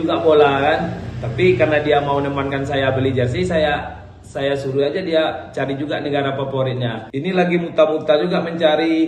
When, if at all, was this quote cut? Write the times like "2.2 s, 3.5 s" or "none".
7.0 s